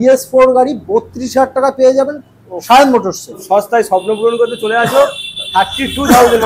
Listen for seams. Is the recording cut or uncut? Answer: cut